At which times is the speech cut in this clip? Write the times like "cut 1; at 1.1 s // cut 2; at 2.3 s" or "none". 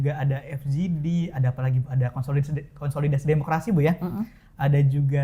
none

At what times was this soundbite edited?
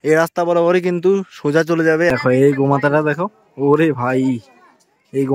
cut 1; at 2.1 s

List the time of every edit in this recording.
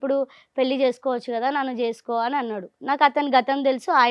none

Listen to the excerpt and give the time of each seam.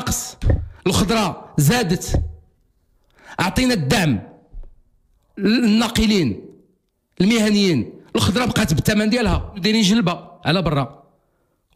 cut 1; at 9.6 s

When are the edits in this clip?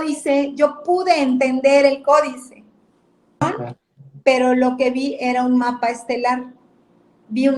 cut 1; at 3.4 s

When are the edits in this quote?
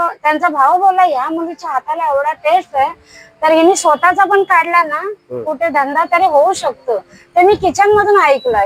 none

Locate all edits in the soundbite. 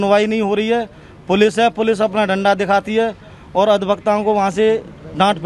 none

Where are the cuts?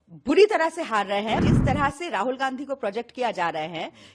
cut 1; at 1.4 s

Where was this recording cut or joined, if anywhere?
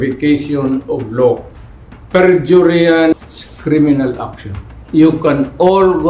cut 1; at 3.2 s

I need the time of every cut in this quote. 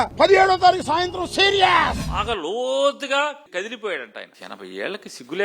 cut 1; at 2.0 s // cut 2; at 4.3 s

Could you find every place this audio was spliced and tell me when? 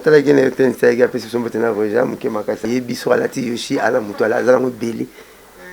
cut 1; at 2.6 s

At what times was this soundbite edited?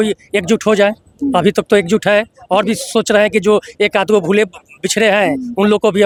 none

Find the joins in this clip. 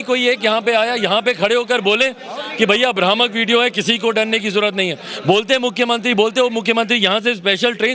none

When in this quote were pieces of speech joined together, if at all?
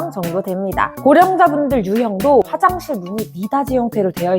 cut 1; at 0.9 s // cut 2; at 2.5 s

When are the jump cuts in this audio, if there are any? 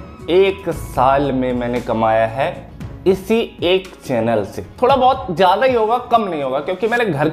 cut 1; at 4.6 s

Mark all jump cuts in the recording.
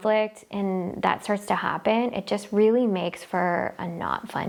none

